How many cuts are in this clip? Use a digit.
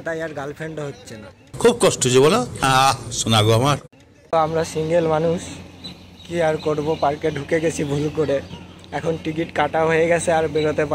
1